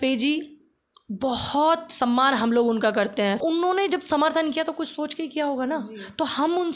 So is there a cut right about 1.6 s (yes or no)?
no